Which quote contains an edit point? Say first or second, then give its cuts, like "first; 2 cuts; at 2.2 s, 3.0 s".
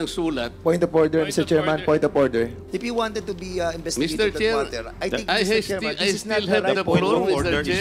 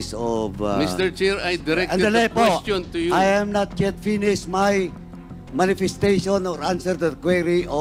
first; 1 cut; at 2.6 s